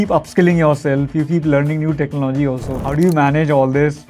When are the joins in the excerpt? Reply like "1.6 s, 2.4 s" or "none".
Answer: 2.8 s